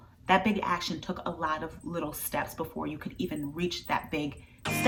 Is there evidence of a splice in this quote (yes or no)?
no